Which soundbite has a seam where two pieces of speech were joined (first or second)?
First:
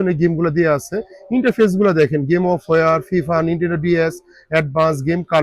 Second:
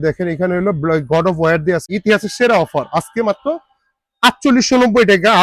second